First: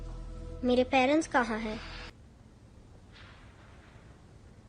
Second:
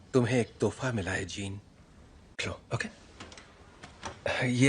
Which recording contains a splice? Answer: first; 1 cut; at 2.2 s

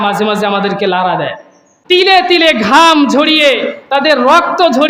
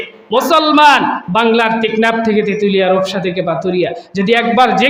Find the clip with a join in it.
first; 1 cut; at 1.7 s

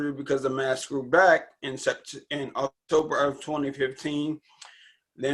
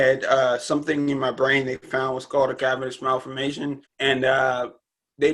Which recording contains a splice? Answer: second; 1 cut; at 3.9 s

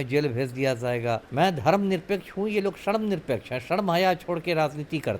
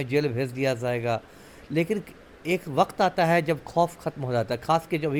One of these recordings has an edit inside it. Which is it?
first; 1 cut; at 1.3 s

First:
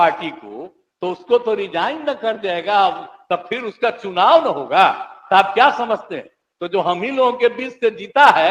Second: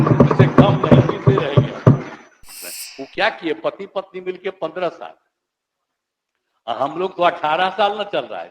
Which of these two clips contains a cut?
second; 1 cut; at 2.5 s

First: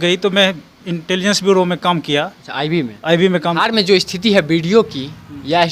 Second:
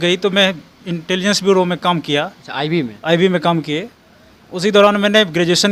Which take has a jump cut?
first; 1 cut; at 3.6 s

